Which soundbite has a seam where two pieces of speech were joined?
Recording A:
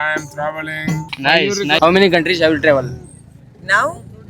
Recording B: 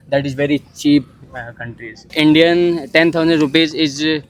A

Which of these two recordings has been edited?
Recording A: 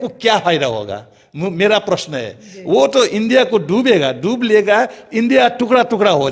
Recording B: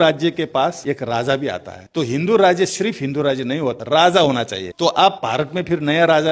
B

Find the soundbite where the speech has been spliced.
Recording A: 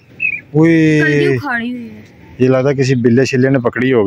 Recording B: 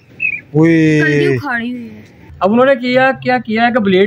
B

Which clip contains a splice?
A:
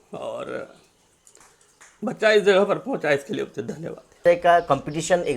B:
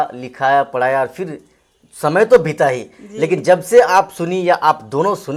A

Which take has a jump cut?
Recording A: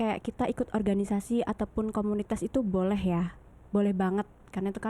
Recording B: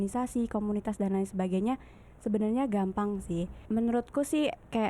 B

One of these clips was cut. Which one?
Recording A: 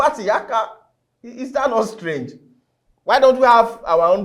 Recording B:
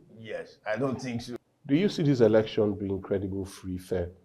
B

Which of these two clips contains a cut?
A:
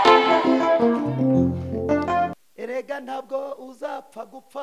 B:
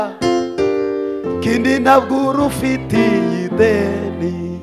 A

